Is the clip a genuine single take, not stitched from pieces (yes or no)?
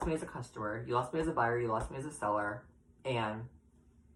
yes